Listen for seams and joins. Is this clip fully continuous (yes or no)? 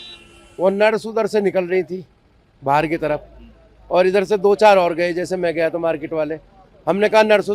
yes